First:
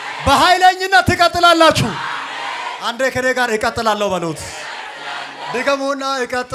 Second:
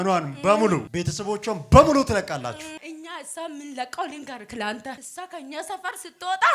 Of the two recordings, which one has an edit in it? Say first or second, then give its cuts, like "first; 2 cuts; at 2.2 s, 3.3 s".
second; 2 cuts; at 2.8 s, 5.0 s